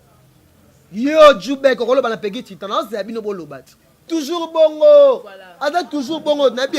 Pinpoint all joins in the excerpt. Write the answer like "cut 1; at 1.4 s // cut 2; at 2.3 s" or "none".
cut 1; at 4.0 s